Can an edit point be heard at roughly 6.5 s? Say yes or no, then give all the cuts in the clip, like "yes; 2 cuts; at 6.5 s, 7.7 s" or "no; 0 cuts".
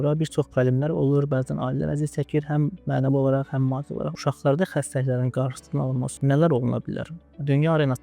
no; 1 cut; at 4.1 s